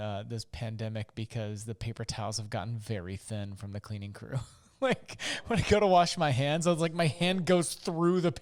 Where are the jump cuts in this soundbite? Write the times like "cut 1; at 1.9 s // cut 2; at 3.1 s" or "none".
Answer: none